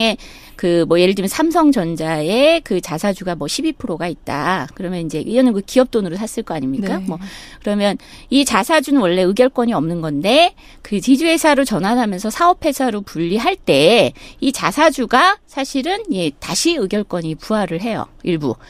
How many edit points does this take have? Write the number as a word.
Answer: zero